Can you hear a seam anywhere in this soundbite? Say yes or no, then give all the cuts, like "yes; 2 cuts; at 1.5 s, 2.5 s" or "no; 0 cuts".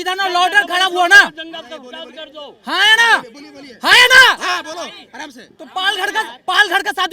no; 0 cuts